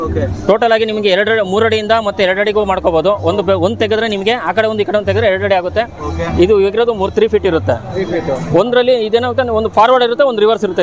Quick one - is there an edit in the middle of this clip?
no; 0 cuts

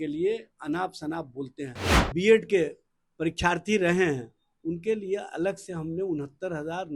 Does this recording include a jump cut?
yes; 1 cut; at 2.1 s

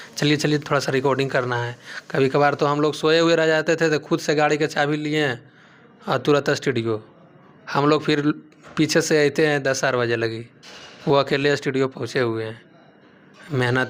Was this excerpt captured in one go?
yes; 0 cuts

